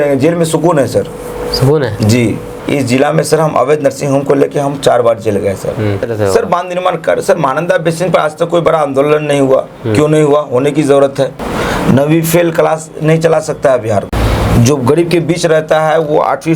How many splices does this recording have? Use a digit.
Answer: 4